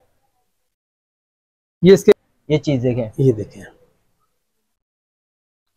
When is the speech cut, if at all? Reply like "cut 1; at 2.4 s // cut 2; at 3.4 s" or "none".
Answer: cut 1; at 2.1 s